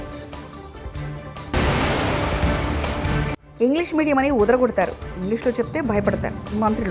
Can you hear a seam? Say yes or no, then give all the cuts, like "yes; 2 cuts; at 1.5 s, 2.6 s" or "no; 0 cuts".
no; 0 cuts